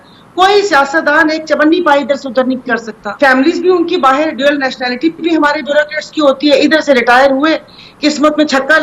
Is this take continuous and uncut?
no; 1 cut; at 3.0 s

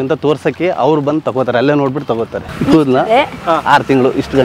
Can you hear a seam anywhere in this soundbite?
yes; 1 cut; at 2.4 s

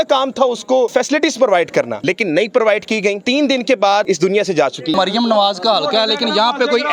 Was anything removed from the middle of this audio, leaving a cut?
yes; 4 cuts; at 0.9 s, 1.9 s, 3.2 s, 4.9 s

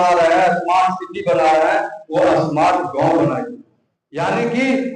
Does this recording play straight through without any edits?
yes; 0 cuts

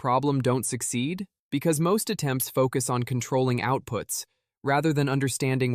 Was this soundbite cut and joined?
yes; 1 cut; at 1.3 s

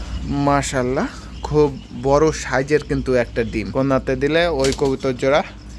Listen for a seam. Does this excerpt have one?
yes; 1 cut; at 3.7 s

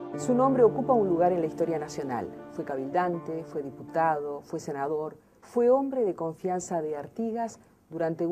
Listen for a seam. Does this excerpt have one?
yes; 1 cut; at 4.4 s

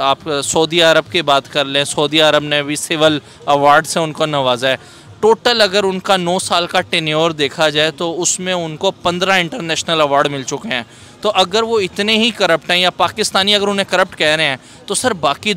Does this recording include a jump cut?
no; 0 cuts

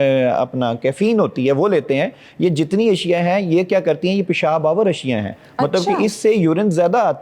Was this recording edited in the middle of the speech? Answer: no; 0 cuts

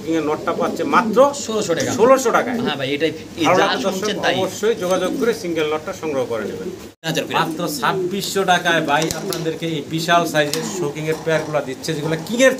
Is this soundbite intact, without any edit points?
no; 1 cut; at 7.0 s

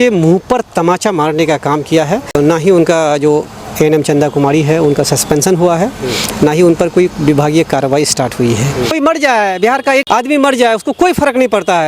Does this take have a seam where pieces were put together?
yes; 3 cuts; at 2.3 s, 9.0 s, 10.1 s

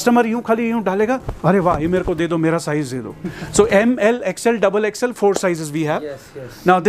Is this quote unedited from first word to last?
yes; 0 cuts

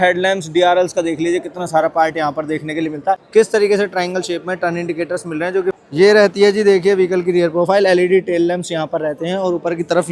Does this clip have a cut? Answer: yes; 2 cuts; at 3.2 s, 5.8 s

